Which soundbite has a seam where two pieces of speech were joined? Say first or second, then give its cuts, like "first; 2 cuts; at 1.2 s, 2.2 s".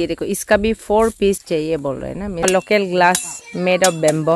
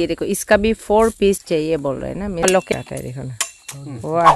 second; 1 cut; at 2.7 s